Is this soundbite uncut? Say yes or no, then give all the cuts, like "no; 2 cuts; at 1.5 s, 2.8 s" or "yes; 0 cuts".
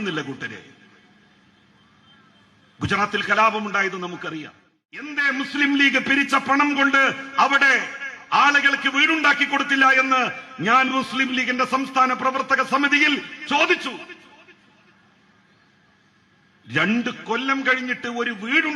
no; 1 cut; at 5.2 s